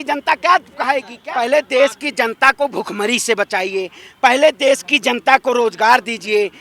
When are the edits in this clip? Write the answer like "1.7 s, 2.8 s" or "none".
1.1 s